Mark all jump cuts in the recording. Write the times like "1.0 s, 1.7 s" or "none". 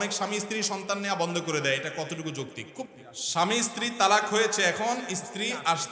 2.9 s